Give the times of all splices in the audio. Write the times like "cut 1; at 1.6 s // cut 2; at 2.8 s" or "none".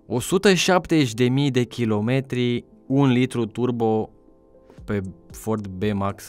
cut 1; at 2.7 s